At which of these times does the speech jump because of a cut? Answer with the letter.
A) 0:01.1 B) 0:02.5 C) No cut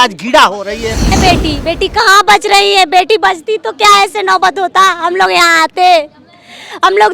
A